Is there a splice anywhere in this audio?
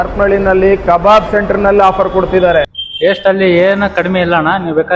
yes; 1 cut; at 2.8 s

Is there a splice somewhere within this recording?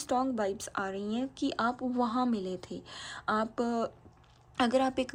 no; 0 cuts

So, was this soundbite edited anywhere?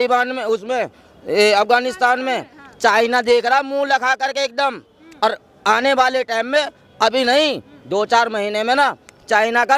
no; 0 cuts

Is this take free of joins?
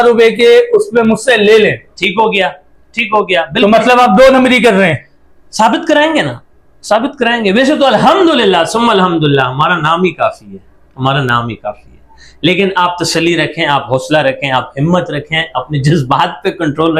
yes; 0 cuts

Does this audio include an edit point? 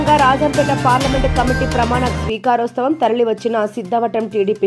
no; 0 cuts

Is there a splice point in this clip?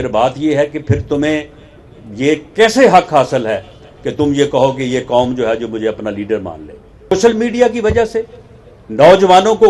yes; 1 cut; at 7.1 s

